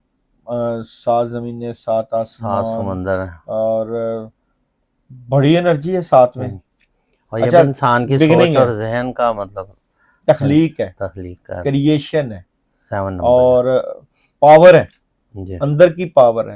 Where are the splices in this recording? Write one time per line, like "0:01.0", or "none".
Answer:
none